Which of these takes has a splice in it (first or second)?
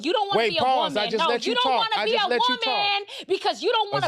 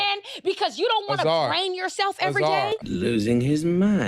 second